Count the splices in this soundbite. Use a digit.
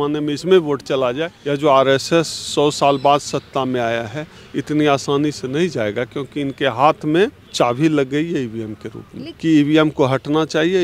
3